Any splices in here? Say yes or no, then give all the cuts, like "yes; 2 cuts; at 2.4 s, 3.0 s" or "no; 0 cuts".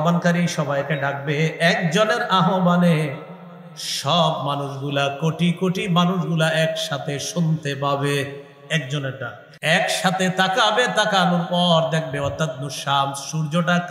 yes; 1 cut; at 9.4 s